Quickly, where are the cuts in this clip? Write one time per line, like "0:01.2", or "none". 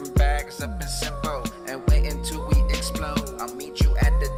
none